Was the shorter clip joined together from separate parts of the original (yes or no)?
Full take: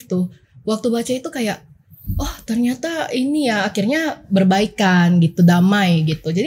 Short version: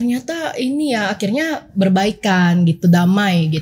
no